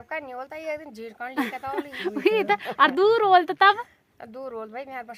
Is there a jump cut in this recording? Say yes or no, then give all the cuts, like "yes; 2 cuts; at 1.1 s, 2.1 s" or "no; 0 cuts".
no; 0 cuts